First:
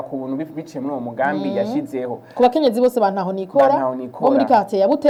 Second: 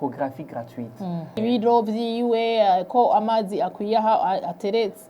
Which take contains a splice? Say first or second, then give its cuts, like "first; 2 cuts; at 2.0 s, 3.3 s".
second; 1 cut; at 1.4 s